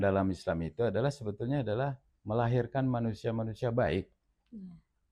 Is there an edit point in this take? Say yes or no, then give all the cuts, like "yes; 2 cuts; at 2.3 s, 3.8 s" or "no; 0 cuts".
no; 0 cuts